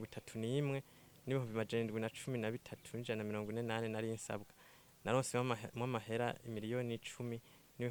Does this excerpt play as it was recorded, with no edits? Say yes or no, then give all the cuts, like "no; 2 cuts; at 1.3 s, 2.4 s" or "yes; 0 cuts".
yes; 0 cuts